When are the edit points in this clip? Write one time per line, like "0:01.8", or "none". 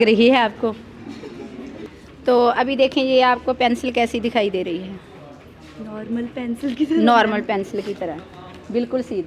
0:01.9